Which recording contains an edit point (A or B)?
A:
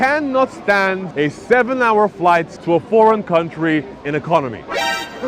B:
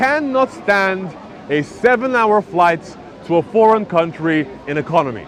A